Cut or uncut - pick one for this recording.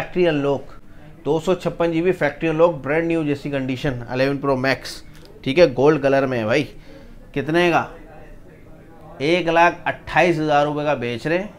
uncut